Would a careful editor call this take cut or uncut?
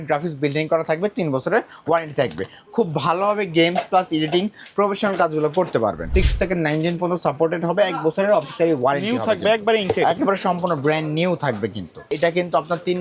cut